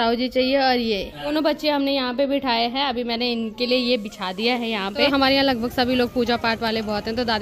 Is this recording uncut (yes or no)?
no